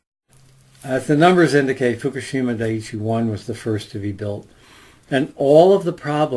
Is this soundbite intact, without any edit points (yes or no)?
no